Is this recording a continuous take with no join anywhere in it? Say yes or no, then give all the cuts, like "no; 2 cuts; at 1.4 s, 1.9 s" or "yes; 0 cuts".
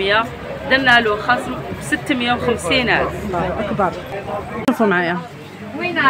no; 1 cut; at 4.7 s